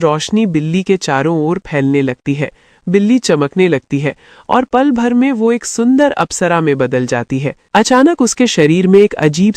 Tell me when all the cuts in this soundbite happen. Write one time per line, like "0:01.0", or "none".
0:07.6